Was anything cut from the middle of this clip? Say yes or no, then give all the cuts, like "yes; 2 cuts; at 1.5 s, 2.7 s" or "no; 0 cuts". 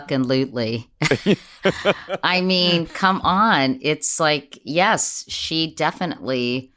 no; 0 cuts